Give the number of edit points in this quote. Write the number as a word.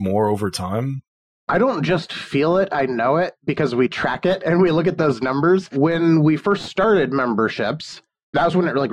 two